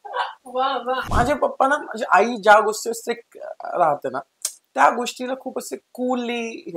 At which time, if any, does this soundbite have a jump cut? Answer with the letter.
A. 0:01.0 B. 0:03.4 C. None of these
A